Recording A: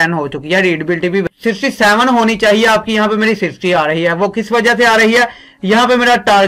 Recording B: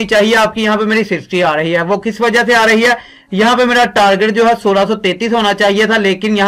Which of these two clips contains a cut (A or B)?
A